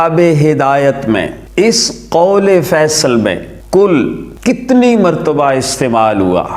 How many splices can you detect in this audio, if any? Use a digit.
3